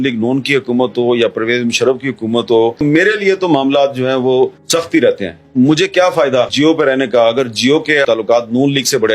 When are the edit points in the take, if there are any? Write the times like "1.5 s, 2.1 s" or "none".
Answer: 4.6 s, 6.5 s, 8.0 s